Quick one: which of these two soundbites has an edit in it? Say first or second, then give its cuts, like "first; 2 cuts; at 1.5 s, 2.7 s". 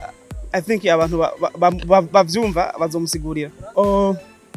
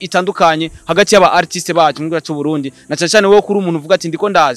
first; 1 cut; at 3.6 s